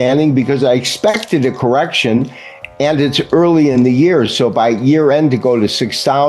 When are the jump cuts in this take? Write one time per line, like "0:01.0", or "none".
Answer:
none